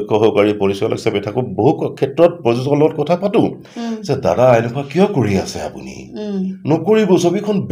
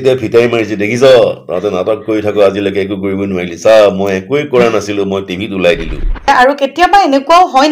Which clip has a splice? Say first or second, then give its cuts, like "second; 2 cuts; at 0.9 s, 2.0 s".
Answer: second; 1 cut; at 6.3 s